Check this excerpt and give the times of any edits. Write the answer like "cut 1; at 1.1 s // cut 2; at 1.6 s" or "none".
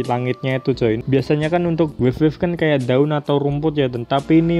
cut 1; at 1.0 s